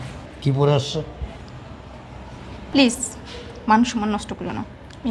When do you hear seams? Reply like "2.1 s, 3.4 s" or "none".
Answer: none